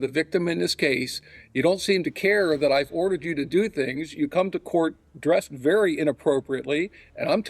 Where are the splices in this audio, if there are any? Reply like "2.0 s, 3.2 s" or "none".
none